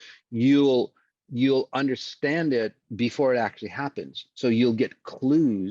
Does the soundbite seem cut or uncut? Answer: cut